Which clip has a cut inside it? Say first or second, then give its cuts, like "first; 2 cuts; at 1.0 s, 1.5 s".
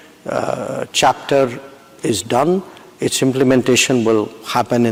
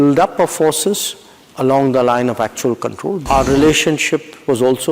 second; 1 cut; at 3.2 s